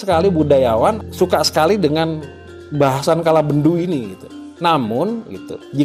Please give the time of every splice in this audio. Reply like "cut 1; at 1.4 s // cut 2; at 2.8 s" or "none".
cut 1; at 1.0 s